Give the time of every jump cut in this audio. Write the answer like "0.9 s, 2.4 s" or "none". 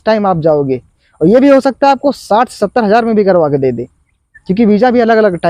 none